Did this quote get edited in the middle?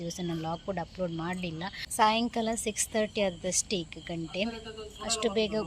yes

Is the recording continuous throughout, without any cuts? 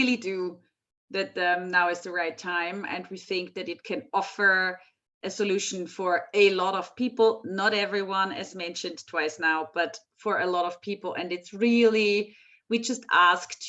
yes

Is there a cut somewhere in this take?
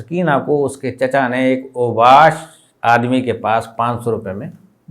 no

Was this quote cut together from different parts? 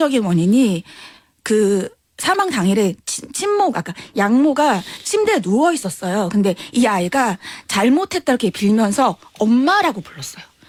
no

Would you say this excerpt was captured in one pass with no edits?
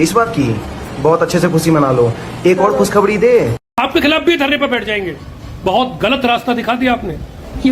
no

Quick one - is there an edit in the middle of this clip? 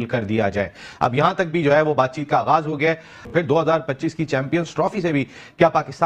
no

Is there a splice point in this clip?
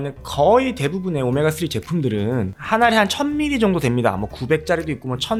no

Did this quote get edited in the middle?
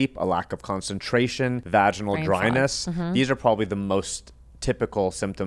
yes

